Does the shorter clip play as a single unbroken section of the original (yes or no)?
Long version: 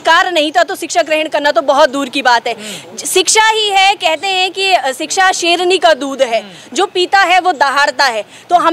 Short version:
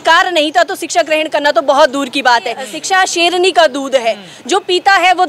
no